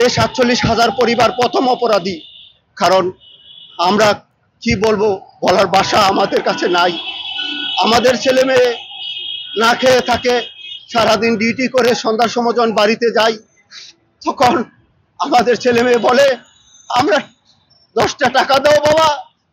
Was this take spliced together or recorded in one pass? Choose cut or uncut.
uncut